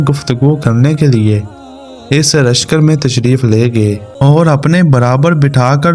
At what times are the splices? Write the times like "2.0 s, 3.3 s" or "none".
4.1 s